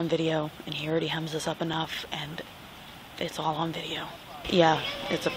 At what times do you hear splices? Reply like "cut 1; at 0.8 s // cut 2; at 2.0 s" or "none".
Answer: cut 1; at 4.5 s